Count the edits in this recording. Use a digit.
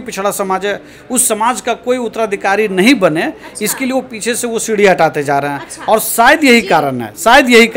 0